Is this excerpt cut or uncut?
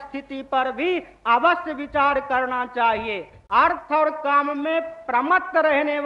cut